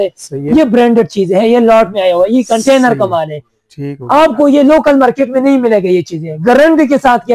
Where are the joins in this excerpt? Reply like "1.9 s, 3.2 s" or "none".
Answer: none

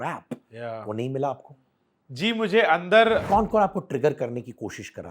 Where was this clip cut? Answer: 3.2 s

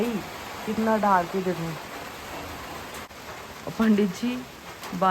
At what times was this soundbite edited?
3.1 s

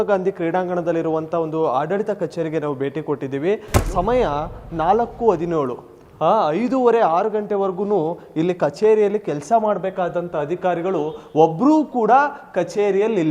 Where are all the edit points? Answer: 3.8 s

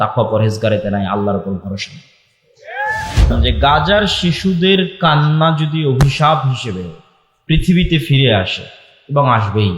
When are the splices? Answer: 3.1 s

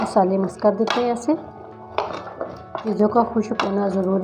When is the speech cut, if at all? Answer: 2.8 s

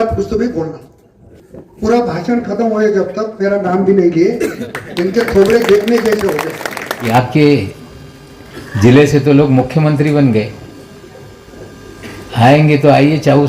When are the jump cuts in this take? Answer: 7.1 s

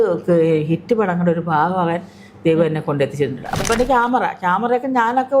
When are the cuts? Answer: 3.6 s

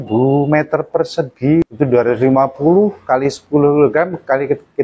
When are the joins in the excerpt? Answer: 1.6 s

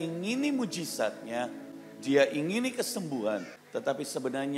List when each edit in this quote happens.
3.6 s

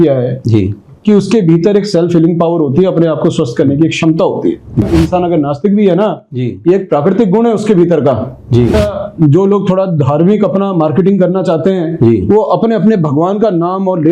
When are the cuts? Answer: 4.8 s, 8.8 s

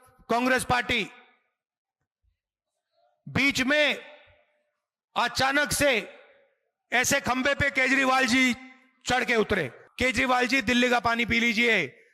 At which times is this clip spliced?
9.8 s

